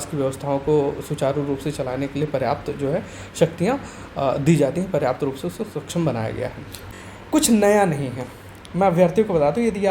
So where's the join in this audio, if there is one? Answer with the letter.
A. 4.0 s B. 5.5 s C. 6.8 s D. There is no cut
C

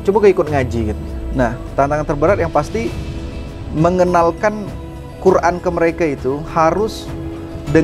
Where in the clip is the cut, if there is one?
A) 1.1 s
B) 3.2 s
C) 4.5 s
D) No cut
A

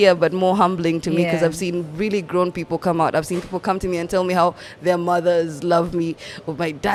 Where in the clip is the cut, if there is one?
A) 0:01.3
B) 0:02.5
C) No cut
C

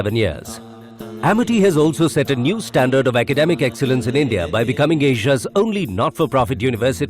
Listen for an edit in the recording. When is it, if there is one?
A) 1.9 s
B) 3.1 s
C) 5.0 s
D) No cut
A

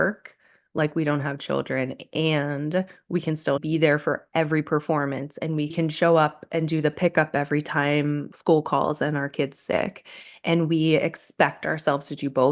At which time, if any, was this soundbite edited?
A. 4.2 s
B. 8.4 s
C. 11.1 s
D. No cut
B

